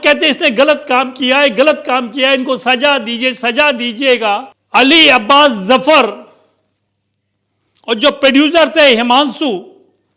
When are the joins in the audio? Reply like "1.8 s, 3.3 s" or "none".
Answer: 4.5 s